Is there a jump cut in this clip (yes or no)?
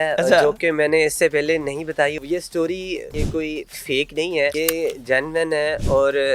yes